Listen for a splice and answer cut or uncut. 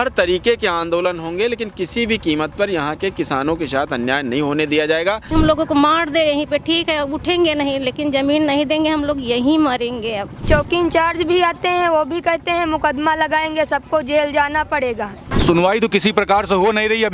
cut